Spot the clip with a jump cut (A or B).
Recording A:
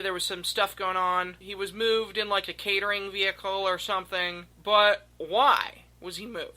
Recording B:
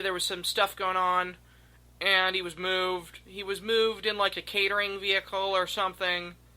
A